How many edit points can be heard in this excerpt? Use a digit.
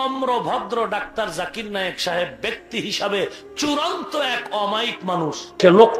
0